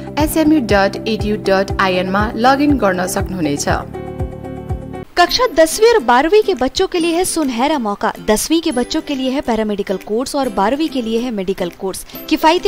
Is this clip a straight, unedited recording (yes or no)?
yes